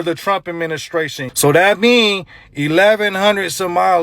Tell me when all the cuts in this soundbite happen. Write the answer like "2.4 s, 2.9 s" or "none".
1.2 s